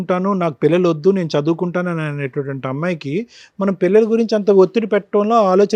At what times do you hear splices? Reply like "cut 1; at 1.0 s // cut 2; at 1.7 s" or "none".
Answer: none